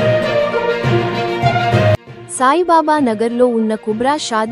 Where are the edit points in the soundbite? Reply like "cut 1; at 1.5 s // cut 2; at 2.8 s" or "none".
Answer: cut 1; at 2.0 s